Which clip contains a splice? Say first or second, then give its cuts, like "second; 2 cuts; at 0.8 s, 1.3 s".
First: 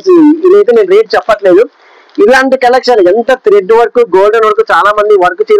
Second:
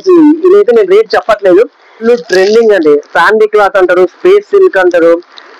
second; 1 cut; at 2.0 s